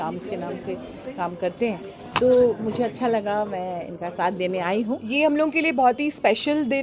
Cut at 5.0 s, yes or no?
yes